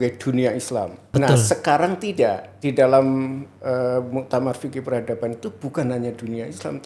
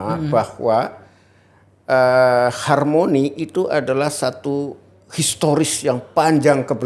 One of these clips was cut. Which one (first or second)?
first